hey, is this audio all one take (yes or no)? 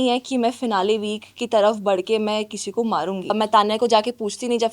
no